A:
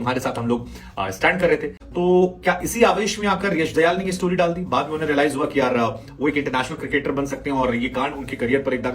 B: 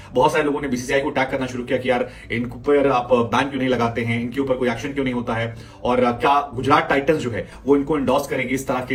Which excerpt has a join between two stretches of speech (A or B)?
A